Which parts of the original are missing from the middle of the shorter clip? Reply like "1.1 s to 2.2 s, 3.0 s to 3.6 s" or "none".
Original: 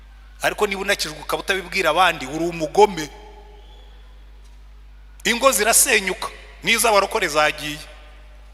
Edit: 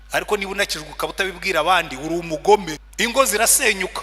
3.1 s to 5.1 s